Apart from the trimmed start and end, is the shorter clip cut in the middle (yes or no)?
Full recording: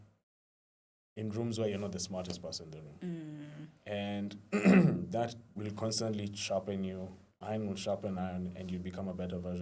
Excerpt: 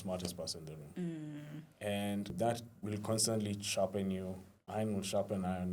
yes